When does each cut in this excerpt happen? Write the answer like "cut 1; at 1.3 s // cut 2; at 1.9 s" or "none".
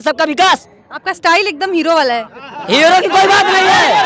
none